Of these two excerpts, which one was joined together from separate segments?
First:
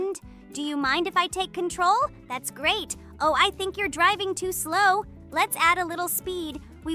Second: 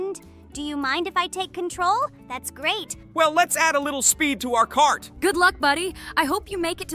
second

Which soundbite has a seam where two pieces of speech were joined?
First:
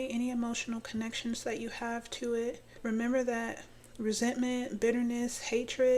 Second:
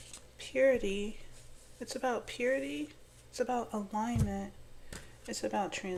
first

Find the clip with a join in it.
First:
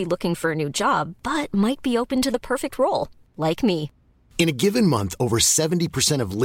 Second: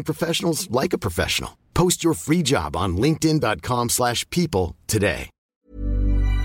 second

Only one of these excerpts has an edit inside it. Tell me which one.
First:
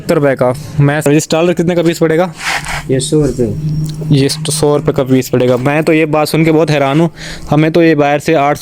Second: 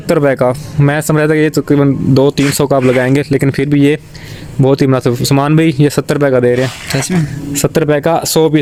first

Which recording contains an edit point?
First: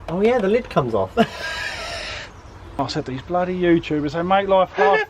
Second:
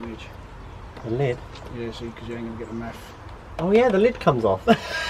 first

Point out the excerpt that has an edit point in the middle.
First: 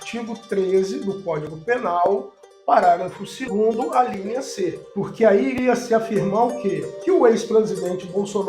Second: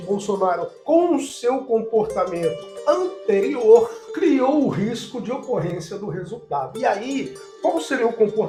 first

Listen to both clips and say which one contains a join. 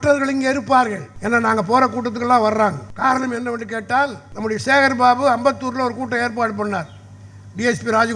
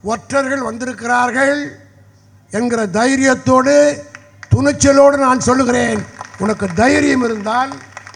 first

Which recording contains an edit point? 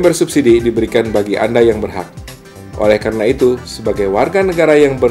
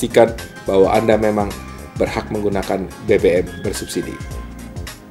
second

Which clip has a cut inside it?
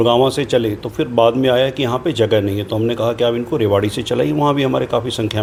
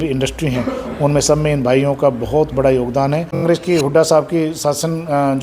second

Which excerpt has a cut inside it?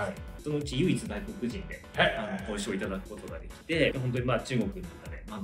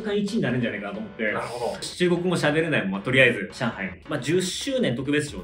second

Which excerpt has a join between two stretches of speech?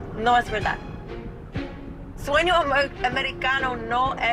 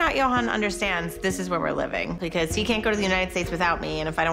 second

